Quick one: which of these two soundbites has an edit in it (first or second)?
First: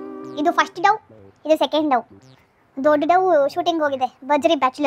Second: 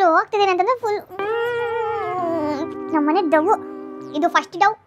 second